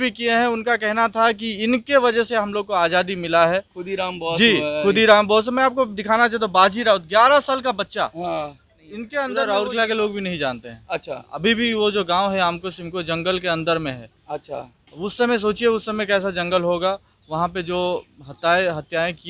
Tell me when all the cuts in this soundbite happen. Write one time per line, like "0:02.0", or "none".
0:09.3